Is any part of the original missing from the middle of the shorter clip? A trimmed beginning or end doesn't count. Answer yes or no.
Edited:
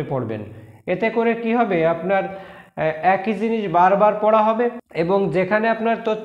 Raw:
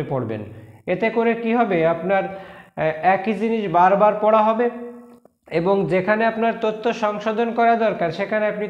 yes